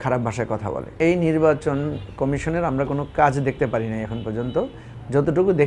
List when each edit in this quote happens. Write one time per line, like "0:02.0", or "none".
0:01.0